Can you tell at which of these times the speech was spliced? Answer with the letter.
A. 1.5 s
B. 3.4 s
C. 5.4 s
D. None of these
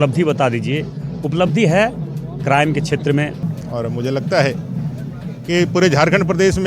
B